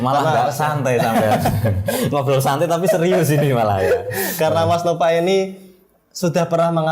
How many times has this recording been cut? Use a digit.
0